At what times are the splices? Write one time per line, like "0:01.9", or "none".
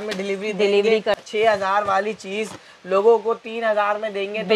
0:01.2